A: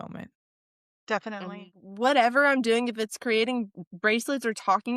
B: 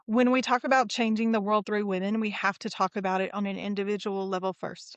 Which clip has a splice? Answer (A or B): A